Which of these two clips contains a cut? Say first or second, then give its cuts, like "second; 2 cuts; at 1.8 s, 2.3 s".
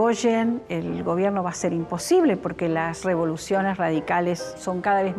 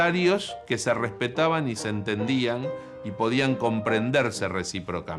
first; 1 cut; at 2.9 s